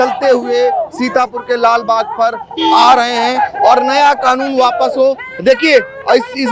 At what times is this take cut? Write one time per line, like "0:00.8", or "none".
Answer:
none